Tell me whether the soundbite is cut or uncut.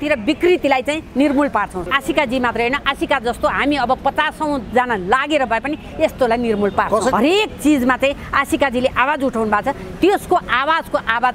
cut